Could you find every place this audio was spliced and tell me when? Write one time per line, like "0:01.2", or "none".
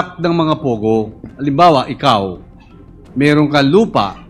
none